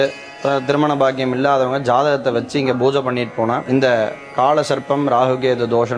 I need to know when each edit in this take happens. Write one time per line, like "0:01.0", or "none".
0:03.6